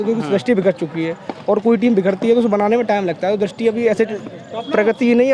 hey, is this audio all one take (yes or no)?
yes